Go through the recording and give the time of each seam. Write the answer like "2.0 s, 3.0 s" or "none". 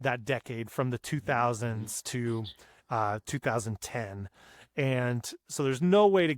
none

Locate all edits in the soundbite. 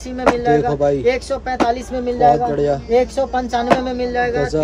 none

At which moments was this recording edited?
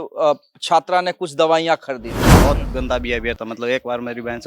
2.3 s

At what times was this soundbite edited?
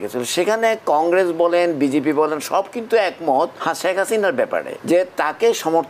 3.6 s, 4.7 s

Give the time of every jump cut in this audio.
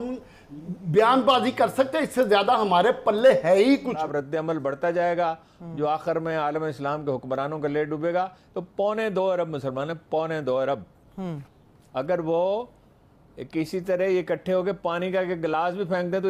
4.0 s

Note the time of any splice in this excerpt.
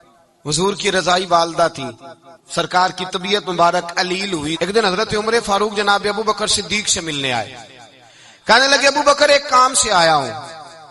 4.5 s

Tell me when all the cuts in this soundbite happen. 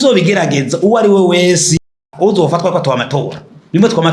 1.9 s

